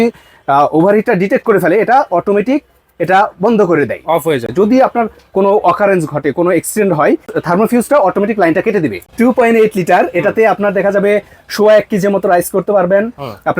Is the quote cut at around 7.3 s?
yes; 3 cuts; at 4.5 s, 7.3 s, 9.0 s

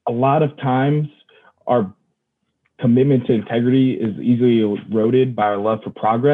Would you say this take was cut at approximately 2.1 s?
no; 0 cuts

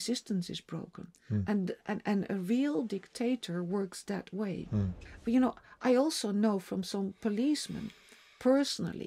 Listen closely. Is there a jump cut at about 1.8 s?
no; 1 cut; at 5.0 s

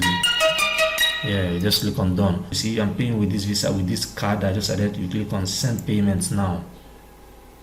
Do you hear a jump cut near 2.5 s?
yes; 1 cut; at 2.5 s

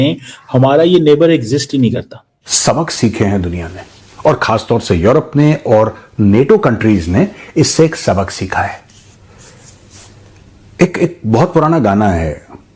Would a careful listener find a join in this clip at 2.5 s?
yes; 1 cut; at 2.5 s

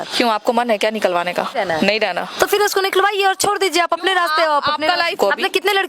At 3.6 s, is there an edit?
no; 2 cuts; at 1.5 s, 5.1 s

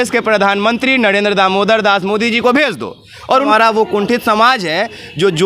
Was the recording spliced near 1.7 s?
no; 1 cut; at 3.5 s

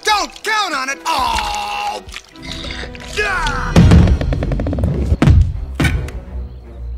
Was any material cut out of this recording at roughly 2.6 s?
yes; 3 cuts; at 0.9 s, 2.6 s, 4.3 s

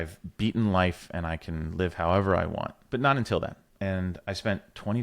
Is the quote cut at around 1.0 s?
no; 2 cuts; at 2.8 s, 3.6 s

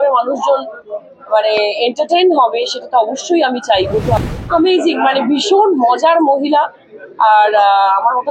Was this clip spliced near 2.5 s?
no; 1 cut; at 4.2 s

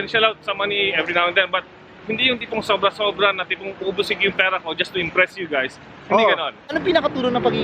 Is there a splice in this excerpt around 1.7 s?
no; 1 cut; at 6.6 s

